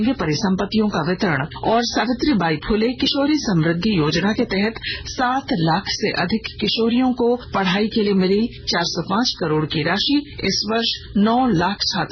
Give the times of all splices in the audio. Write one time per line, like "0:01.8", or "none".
0:01.5
0:07.5
0:08.6
0:10.8

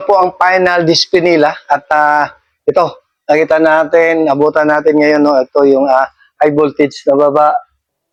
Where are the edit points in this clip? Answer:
none

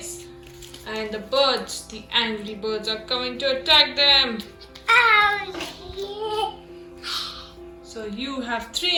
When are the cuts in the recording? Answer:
none

